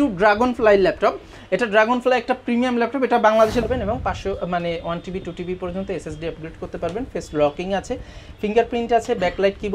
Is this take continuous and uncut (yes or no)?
no